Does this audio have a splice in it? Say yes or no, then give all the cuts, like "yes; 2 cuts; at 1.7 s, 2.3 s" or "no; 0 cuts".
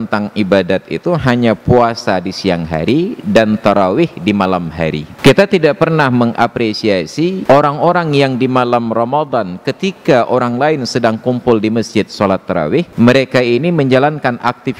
yes; 3 cuts; at 5.1 s, 7.4 s, 12.9 s